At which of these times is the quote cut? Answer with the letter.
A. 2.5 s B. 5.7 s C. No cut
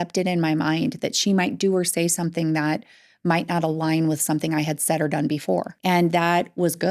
B